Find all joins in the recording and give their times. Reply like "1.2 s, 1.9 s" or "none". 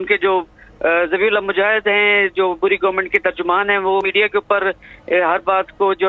none